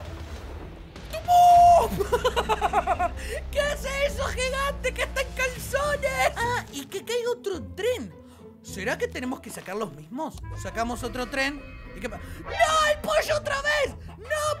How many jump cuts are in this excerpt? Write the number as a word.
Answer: one